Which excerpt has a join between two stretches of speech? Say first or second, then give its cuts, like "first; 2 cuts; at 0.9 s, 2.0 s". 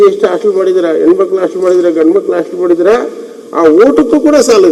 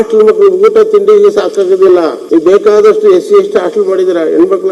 second; 1 cut; at 2.2 s